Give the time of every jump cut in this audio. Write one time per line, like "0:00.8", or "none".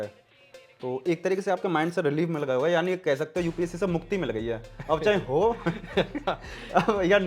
none